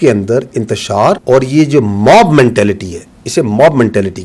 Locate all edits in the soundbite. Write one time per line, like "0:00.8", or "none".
0:01.2